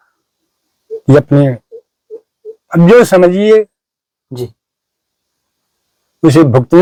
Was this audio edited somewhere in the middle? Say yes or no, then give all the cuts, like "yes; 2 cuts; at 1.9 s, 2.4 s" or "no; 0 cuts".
no; 0 cuts